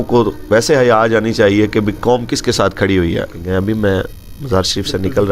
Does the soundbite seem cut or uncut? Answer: cut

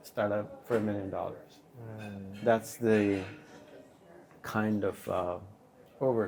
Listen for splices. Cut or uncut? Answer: uncut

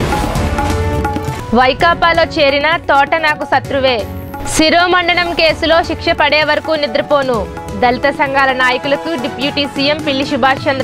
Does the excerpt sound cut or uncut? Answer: uncut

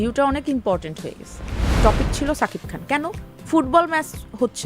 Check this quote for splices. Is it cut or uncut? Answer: cut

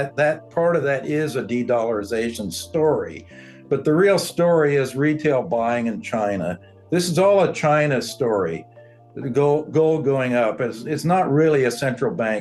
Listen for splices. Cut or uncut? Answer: uncut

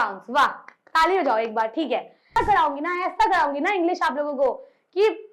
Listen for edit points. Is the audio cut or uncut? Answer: cut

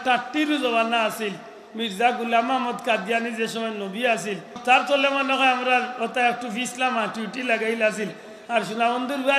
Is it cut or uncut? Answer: cut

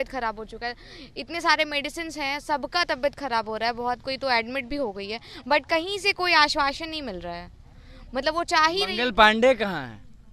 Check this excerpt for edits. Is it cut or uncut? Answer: uncut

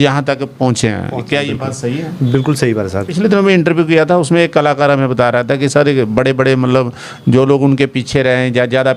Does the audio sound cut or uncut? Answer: cut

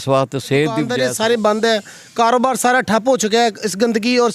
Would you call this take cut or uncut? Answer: cut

